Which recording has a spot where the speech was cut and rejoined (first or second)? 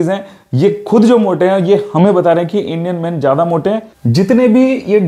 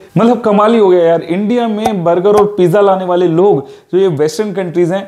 first